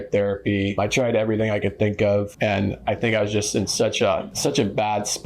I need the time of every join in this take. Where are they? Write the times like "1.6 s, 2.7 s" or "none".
0.8 s, 2.3 s, 4.3 s